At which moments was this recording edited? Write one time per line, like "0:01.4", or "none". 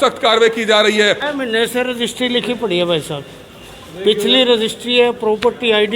0:01.2